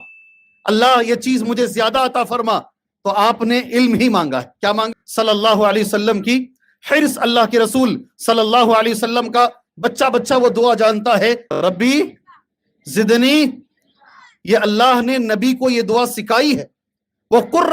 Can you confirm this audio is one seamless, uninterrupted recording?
no; 2 cuts; at 4.9 s, 11.5 s

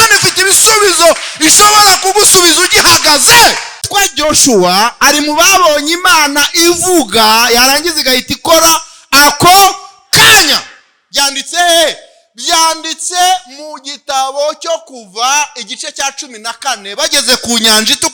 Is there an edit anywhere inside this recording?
yes; 1 cut; at 3.8 s

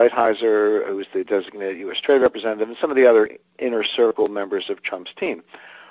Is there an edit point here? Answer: yes; 1 cut; at 2.2 s

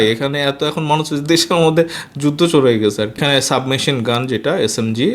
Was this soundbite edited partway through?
yes; 1 cut; at 3.1 s

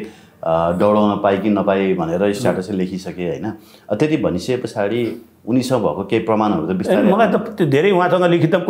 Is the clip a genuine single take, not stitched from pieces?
yes; 0 cuts

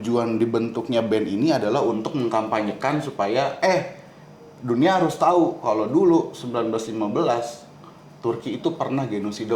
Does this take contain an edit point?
no; 0 cuts

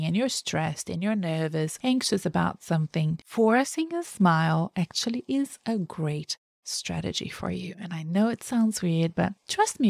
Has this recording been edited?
yes; 2 cuts; at 1.7 s, 3.2 s

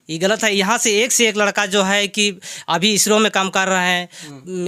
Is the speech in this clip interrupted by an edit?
no; 0 cuts

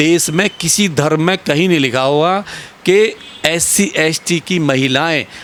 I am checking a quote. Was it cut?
no; 0 cuts

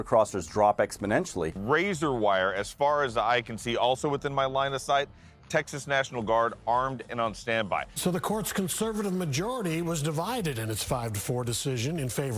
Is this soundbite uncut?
no; 2 cuts; at 1.6 s, 8.0 s

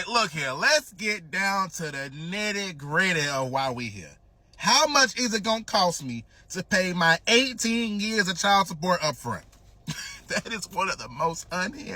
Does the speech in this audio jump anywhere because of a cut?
no; 0 cuts

